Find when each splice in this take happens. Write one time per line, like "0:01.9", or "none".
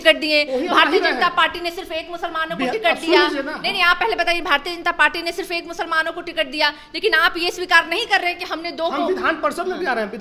none